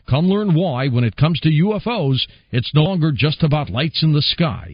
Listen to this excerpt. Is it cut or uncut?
cut